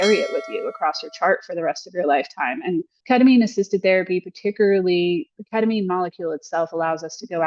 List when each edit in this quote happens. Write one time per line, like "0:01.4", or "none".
0:02.9